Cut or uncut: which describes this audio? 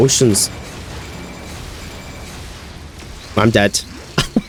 uncut